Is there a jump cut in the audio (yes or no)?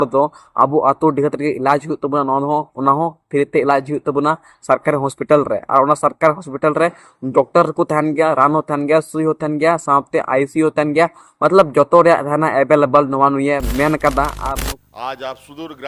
yes